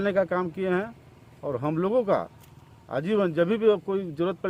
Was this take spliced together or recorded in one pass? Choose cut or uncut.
uncut